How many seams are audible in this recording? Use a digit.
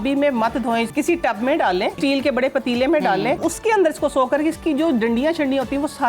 3